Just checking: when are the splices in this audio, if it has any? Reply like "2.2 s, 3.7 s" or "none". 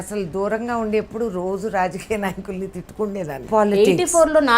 3.4 s